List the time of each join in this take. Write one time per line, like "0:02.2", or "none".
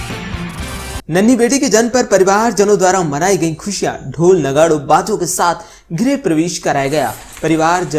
0:01.0